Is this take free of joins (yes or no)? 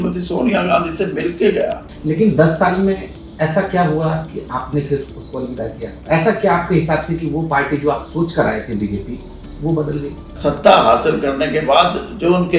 no